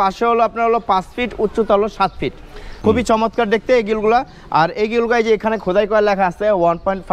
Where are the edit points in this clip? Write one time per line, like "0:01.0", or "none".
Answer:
0:02.6